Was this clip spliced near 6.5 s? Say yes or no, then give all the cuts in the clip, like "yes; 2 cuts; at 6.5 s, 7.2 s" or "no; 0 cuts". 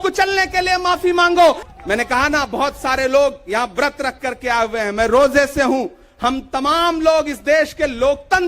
no; 1 cut; at 1.6 s